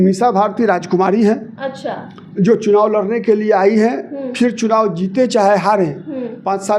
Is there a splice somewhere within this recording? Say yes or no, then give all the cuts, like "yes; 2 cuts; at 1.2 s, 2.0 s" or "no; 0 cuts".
no; 0 cuts